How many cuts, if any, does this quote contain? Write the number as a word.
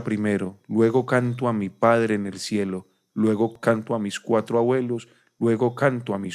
one